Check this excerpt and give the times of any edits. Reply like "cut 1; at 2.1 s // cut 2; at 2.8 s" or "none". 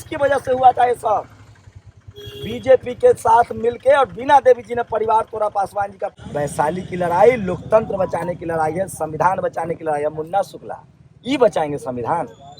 cut 1; at 6.0 s